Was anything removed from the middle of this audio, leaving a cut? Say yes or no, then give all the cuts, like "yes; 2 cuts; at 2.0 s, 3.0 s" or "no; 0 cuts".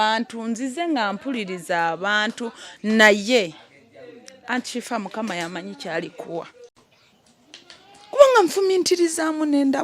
yes; 1 cut; at 6.6 s